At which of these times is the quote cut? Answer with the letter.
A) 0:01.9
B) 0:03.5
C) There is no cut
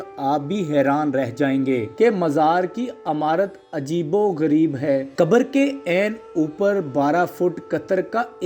A